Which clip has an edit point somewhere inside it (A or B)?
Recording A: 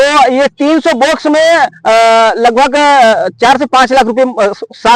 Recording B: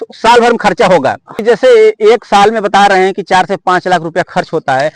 B